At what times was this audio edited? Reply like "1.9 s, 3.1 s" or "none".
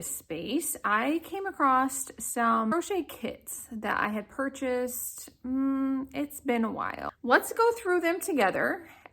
2.7 s, 7.0 s